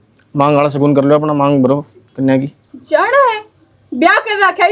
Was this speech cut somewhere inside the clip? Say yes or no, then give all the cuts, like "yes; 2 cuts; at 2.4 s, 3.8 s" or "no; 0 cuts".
yes; 1 cut; at 2.7 s